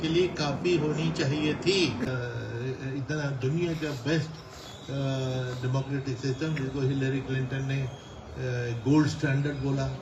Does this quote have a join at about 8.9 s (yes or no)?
no